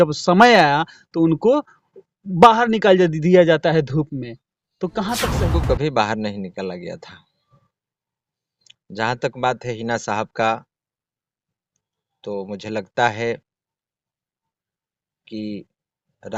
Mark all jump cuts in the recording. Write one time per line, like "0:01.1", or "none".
0:05.3